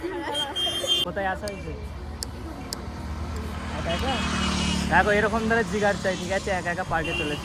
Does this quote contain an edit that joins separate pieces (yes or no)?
yes